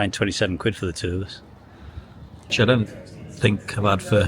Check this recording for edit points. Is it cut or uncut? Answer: cut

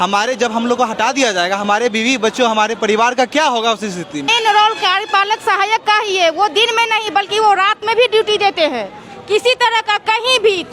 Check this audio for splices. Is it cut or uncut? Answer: cut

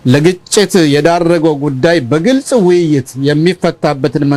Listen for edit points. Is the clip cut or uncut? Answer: uncut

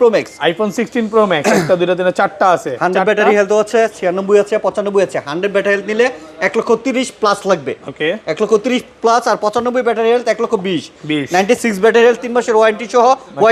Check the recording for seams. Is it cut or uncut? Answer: uncut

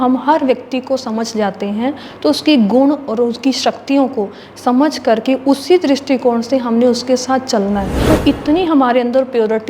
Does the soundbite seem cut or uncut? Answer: cut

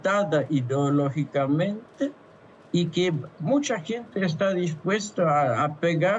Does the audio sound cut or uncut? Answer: uncut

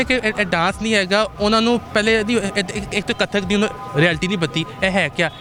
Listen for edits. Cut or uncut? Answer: uncut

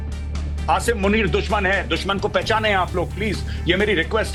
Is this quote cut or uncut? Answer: uncut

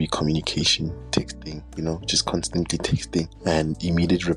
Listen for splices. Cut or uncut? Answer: cut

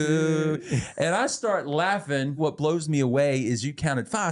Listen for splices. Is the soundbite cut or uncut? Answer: cut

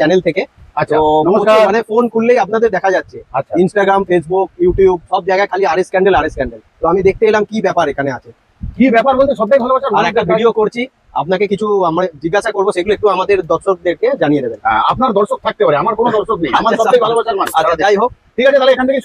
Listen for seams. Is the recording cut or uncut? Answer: uncut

